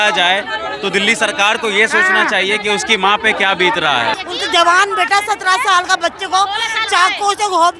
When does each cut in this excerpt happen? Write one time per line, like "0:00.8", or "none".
0:04.2